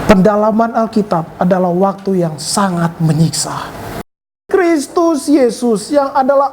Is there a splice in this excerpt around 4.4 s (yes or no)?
yes